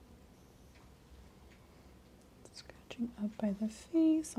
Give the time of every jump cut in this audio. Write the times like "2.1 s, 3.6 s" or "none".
none